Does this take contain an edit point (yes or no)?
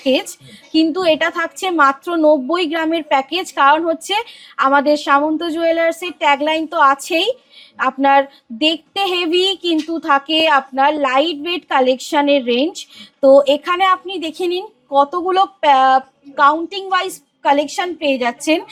no